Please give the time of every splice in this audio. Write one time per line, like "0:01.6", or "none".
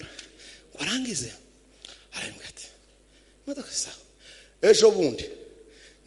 none